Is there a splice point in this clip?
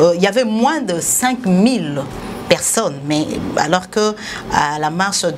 no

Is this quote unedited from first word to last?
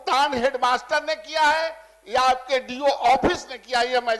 yes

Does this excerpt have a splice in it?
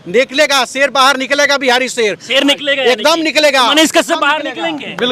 no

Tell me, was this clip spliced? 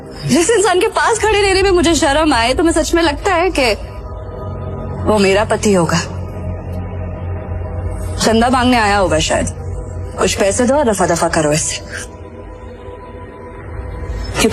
no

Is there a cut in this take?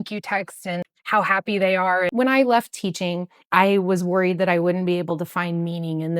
yes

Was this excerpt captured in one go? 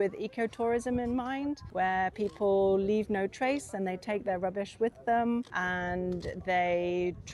no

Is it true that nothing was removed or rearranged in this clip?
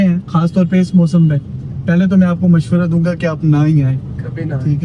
yes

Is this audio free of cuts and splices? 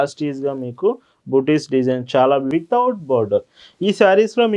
no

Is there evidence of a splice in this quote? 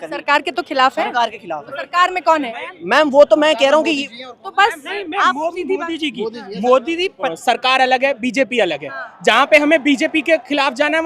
yes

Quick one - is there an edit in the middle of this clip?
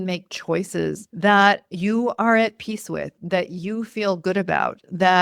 yes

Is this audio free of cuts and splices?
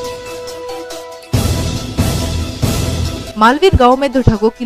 no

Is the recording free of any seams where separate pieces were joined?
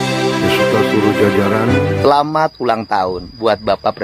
no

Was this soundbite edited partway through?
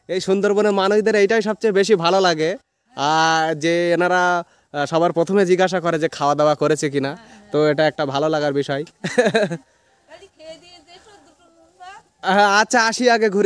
no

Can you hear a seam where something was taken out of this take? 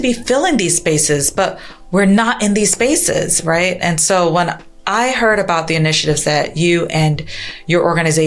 no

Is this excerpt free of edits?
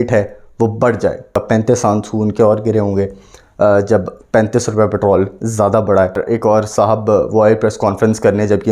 no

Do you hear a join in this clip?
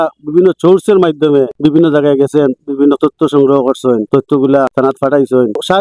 no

